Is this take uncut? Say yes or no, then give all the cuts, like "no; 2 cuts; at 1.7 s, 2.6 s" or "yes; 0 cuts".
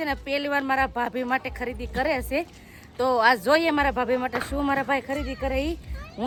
yes; 0 cuts